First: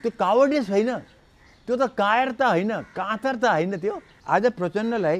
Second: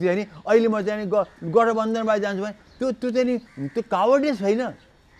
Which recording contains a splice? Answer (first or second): first